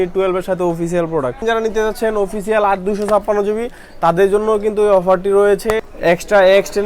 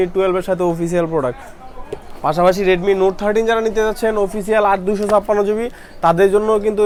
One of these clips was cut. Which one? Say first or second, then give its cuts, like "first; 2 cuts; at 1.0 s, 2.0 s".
first; 2 cuts; at 1.4 s, 5.8 s